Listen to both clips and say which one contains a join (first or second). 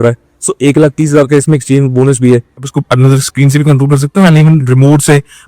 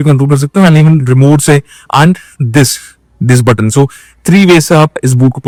first